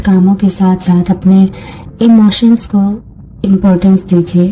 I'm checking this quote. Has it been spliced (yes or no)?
no